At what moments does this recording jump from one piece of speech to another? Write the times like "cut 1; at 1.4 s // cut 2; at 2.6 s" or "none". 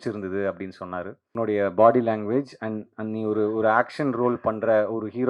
cut 1; at 1.3 s